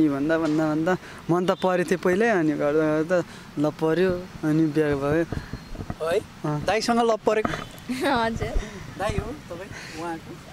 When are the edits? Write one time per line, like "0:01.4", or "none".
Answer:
none